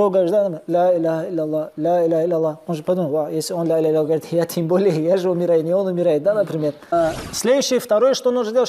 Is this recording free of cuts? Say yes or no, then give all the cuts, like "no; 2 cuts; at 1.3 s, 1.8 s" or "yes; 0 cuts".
no; 1 cut; at 6.8 s